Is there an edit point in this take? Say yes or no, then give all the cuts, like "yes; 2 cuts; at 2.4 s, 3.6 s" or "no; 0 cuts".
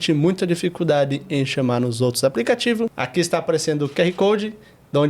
yes; 1 cut; at 3.0 s